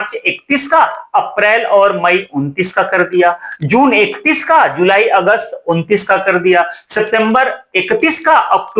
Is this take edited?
no; 0 cuts

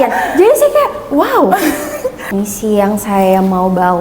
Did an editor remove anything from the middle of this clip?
yes; 1 cut; at 2.2 s

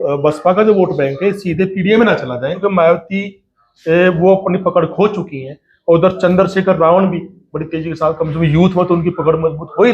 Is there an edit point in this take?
yes; 1 cut; at 2.5 s

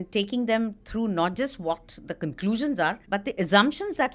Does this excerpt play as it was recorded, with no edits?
no; 1 cut; at 3.0 s

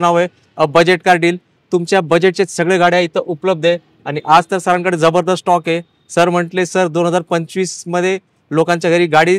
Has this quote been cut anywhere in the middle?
no; 0 cuts

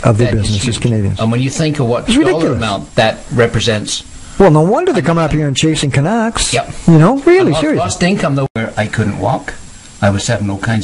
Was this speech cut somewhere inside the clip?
yes; 1 cut; at 8.6 s

